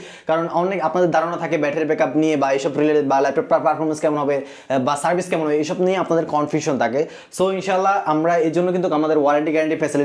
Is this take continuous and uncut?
yes; 0 cuts

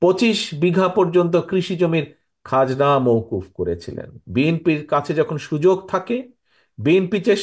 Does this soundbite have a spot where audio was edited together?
yes; 1 cut; at 4.2 s

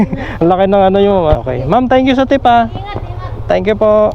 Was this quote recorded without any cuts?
no; 1 cut; at 1.4 s

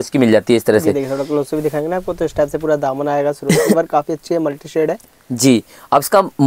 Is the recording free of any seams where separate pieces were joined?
yes; 0 cuts

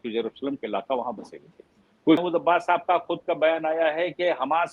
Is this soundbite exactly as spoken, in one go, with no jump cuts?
no; 1 cut; at 2.2 s

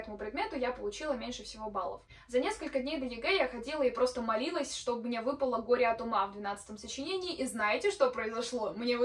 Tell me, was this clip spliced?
no; 0 cuts

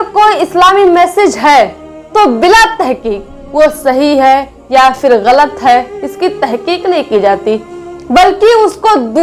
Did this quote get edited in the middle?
no; 0 cuts

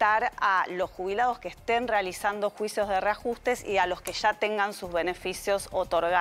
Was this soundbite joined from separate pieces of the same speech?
no; 0 cuts

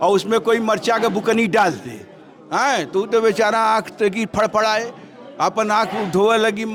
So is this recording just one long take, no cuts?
yes; 0 cuts

